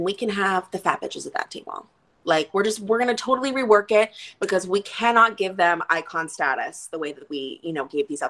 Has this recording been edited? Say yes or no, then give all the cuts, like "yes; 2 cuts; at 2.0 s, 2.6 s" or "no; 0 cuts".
no; 0 cuts